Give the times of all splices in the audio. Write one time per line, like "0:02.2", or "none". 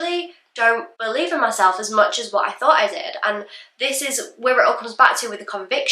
0:00.9